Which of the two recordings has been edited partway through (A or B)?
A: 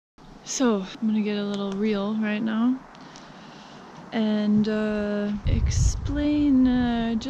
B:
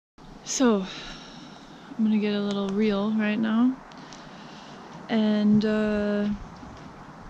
A